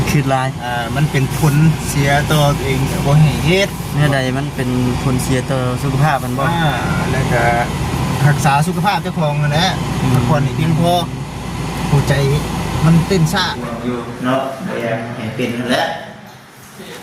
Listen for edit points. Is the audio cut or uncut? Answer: cut